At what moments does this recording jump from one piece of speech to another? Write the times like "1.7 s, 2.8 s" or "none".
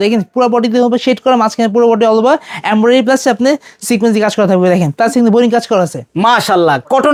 none